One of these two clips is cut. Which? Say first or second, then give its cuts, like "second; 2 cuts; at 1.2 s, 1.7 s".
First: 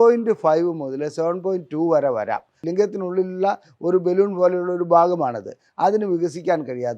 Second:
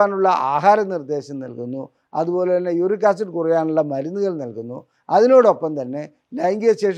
first; 1 cut; at 2.5 s